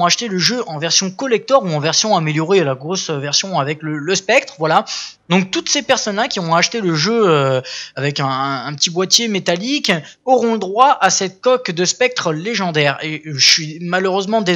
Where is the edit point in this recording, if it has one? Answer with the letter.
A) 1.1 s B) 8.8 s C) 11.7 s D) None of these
C